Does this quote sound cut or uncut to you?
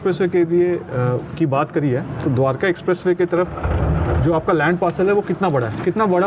uncut